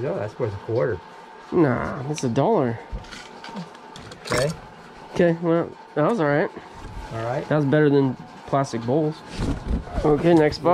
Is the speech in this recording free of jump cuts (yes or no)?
yes